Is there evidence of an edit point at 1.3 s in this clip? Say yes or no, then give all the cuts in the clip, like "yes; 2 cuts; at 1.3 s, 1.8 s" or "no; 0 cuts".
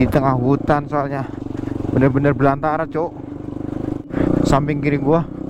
no; 1 cut; at 4.1 s